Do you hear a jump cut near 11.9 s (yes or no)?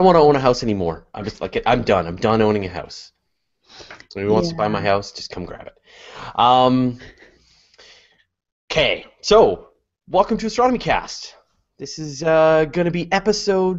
no